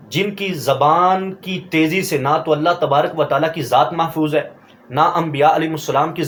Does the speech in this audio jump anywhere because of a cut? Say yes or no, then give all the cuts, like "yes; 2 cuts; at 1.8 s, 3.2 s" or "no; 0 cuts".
no; 0 cuts